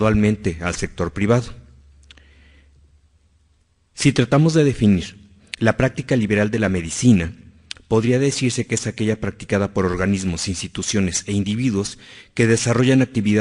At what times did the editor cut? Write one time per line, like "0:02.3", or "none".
0:08.2